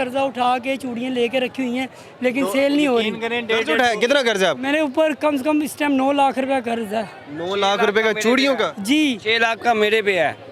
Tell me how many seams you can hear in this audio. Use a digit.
0